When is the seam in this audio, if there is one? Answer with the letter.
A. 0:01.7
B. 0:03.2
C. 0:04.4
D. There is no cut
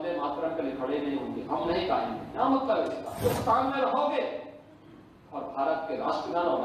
B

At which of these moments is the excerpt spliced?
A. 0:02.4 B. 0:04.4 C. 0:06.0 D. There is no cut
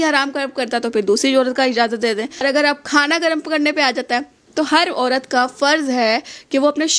A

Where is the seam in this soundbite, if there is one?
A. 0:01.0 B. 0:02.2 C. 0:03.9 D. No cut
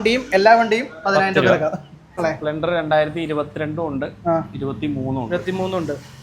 B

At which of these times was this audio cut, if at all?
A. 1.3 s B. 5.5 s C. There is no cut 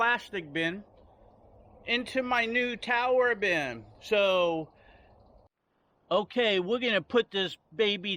B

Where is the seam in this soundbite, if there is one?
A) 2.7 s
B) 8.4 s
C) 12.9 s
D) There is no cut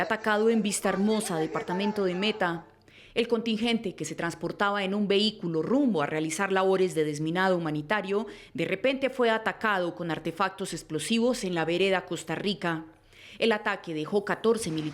C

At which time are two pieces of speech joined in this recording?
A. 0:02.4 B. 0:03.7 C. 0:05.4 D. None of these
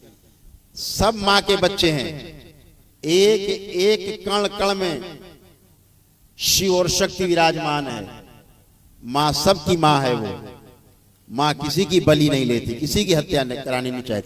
D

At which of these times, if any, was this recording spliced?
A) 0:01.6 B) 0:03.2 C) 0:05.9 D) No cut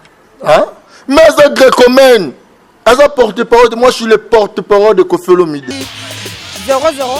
C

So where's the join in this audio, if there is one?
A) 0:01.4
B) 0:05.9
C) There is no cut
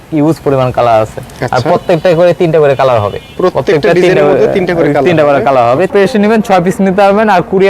B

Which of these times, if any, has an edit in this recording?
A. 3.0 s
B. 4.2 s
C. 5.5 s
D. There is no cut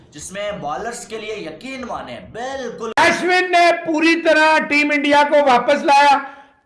A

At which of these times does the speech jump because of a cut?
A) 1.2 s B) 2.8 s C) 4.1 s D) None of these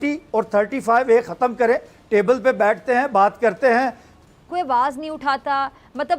C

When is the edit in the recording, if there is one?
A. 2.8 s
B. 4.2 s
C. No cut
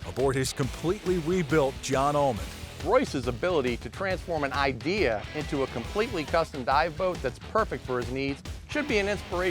A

